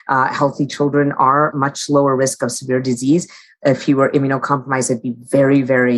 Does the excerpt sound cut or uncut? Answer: cut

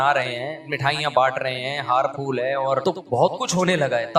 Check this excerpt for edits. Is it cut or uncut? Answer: cut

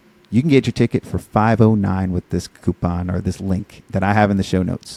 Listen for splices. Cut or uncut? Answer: uncut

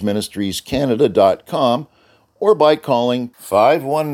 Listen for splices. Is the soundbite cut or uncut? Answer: uncut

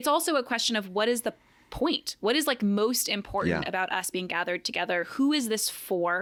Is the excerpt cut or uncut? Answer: uncut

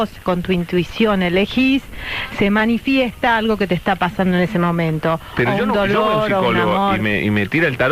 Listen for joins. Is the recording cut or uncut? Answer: uncut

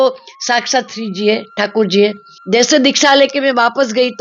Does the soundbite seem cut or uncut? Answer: cut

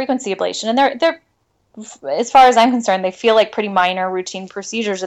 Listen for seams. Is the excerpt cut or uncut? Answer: uncut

